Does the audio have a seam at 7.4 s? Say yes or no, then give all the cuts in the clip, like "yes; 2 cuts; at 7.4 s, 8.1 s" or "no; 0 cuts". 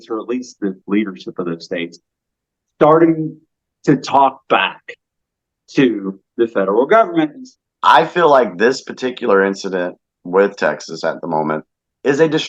yes; 1 cut; at 7.4 s